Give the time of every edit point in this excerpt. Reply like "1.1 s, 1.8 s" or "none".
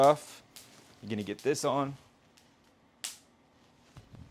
none